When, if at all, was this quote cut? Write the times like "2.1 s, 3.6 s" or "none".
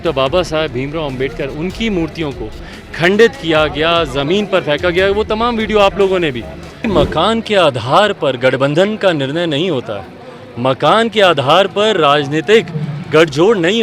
6.9 s

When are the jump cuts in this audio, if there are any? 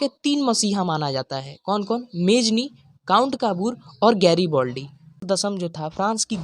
5.2 s

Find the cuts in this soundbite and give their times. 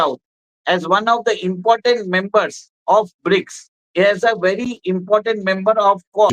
none

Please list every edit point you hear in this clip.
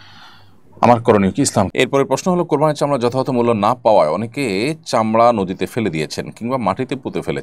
1.7 s

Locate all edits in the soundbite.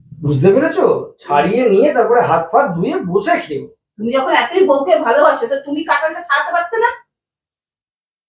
none

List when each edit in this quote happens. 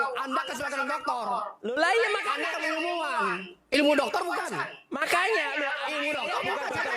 none

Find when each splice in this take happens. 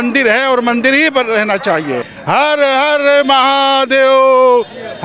2.1 s

